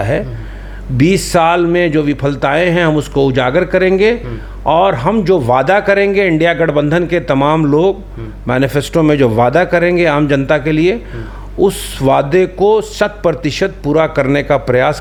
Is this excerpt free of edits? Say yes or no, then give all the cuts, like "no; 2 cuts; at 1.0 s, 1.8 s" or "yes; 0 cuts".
yes; 0 cuts